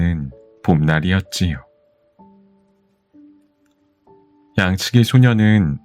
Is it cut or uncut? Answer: uncut